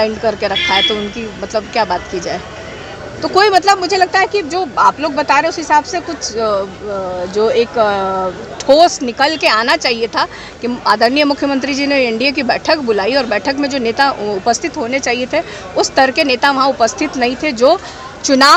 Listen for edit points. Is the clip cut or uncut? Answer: uncut